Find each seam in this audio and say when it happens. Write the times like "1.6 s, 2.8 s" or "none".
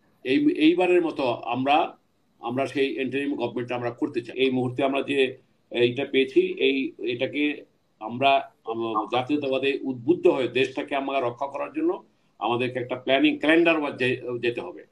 4.3 s

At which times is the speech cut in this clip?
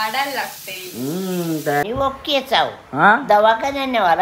1.8 s

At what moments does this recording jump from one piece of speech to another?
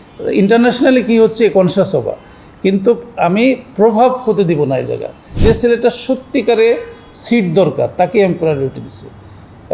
5.4 s

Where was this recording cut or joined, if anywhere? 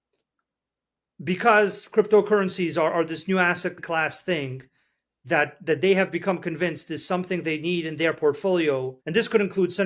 3.8 s, 9.0 s

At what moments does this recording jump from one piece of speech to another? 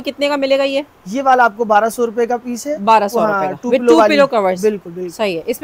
none

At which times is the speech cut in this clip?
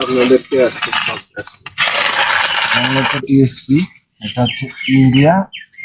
3.0 s

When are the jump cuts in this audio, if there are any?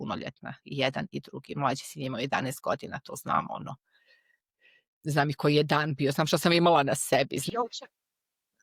none

